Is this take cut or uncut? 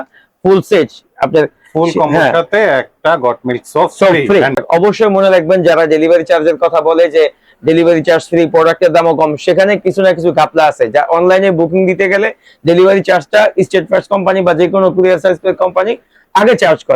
cut